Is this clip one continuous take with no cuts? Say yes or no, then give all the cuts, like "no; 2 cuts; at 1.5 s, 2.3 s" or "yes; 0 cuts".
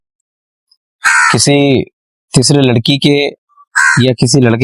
yes; 0 cuts